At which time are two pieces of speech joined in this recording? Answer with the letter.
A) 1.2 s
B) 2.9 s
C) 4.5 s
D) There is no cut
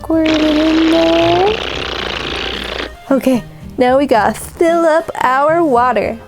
B